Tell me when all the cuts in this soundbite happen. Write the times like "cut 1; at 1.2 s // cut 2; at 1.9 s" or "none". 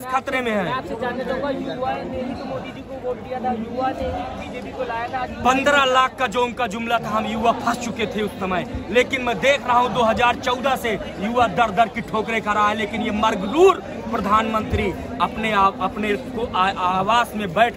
none